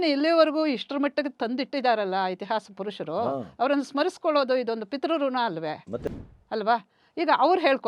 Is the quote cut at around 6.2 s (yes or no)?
yes